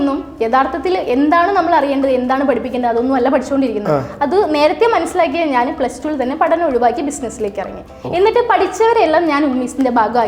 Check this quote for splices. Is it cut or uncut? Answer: uncut